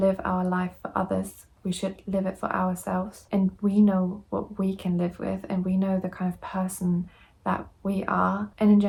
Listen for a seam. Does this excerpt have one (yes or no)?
no